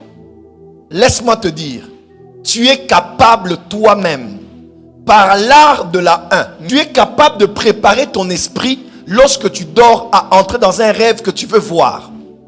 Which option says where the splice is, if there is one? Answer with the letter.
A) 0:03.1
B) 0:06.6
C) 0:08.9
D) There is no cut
B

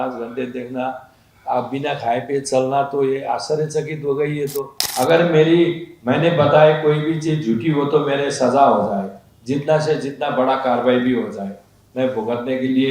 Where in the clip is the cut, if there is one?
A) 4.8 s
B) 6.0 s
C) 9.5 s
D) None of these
A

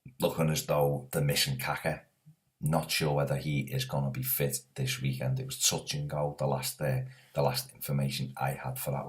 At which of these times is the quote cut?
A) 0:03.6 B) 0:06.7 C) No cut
B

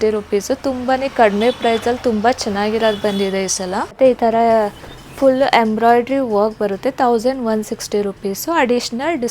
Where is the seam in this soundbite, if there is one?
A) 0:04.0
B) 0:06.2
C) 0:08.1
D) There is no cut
A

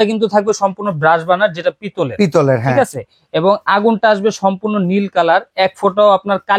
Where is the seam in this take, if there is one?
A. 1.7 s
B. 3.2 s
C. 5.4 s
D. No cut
D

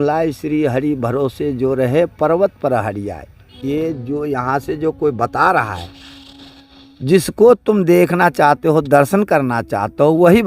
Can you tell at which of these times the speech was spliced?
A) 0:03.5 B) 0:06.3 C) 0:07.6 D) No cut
A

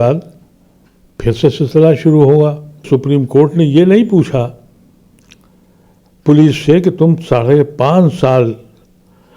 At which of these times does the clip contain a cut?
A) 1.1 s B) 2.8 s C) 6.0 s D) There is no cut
B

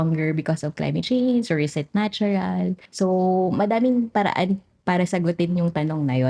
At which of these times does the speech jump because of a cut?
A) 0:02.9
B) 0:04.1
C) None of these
A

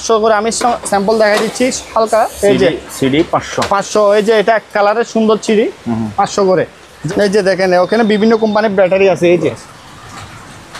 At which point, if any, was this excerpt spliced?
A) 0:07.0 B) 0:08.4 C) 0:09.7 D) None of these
A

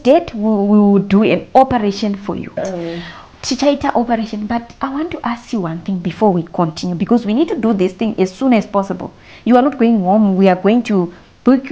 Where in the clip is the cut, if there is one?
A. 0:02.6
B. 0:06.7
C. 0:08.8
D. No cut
A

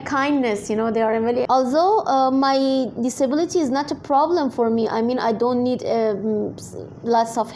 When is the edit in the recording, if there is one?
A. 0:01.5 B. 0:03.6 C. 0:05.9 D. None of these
A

